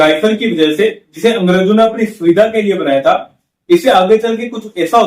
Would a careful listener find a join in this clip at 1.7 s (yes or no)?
no